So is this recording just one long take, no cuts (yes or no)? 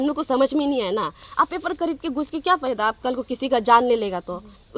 no